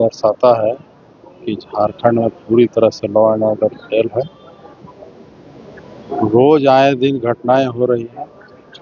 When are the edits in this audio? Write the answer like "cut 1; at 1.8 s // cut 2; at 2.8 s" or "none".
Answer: none